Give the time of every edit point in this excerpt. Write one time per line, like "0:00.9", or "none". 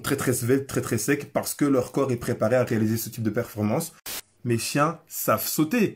0:04.2